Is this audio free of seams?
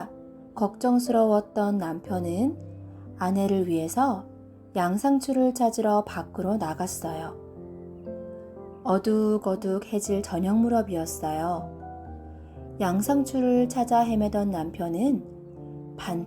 no; 2 cuts; at 7.3 s, 8.6 s

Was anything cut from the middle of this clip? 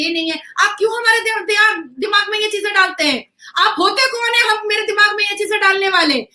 no; 0 cuts

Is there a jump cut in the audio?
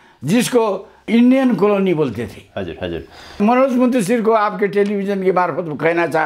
yes; 2 cuts; at 1.1 s, 3.4 s

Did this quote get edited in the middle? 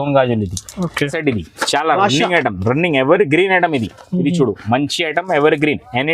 yes; 1 cut; at 1.1 s

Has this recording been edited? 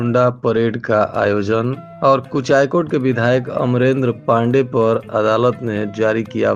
no; 0 cuts

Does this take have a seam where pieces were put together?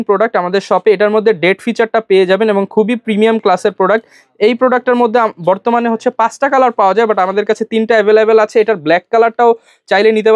no; 0 cuts

